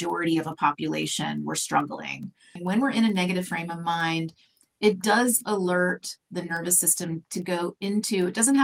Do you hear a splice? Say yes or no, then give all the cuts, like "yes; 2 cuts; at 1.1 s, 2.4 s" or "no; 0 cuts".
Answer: yes; 1 cut; at 2.6 s